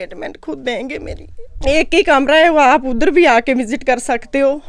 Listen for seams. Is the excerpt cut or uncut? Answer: cut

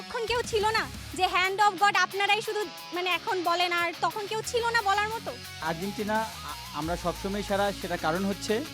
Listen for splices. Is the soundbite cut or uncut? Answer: cut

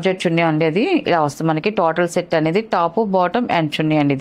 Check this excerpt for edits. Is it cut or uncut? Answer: uncut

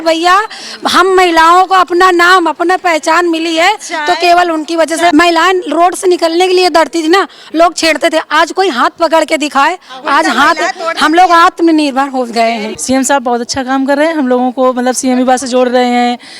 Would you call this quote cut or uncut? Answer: cut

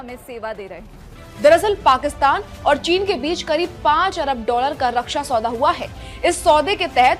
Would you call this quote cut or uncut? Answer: cut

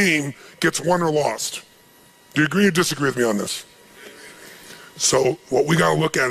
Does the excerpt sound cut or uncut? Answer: uncut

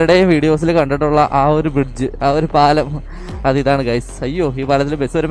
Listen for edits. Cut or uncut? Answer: uncut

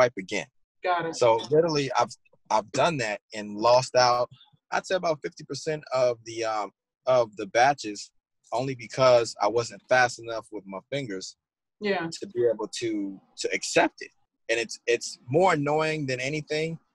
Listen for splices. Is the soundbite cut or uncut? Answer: uncut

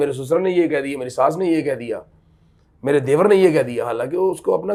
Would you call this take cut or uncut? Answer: uncut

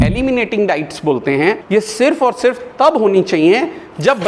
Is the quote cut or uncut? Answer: cut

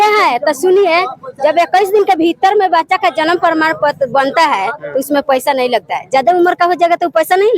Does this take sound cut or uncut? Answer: uncut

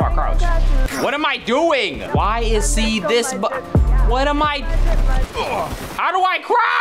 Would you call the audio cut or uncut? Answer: uncut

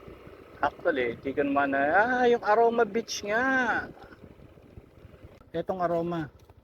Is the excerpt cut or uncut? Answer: cut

